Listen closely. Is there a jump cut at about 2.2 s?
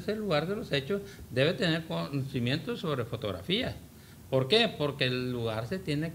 no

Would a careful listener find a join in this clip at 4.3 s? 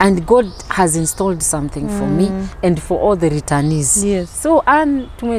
yes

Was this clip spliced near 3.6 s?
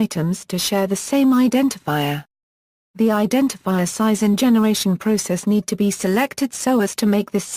yes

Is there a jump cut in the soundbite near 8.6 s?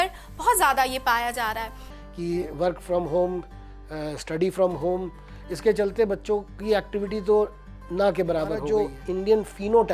yes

